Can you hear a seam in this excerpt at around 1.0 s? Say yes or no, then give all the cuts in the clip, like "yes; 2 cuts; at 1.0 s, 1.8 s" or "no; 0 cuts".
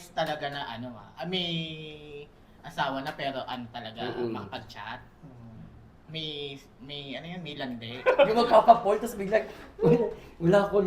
yes; 2 cuts; at 1.0 s, 7.9 s